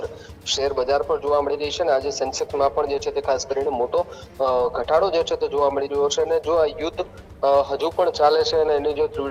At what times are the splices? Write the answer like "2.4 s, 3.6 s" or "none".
none